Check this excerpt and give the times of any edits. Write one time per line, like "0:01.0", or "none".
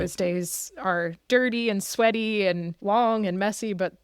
0:01.2
0:02.7